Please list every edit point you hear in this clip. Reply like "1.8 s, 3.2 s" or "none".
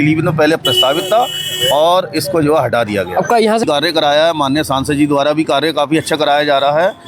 3.6 s